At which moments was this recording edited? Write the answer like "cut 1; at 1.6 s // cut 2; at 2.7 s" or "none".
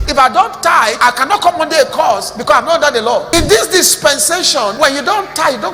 cut 1; at 1.0 s // cut 2; at 3.3 s // cut 3; at 4.7 s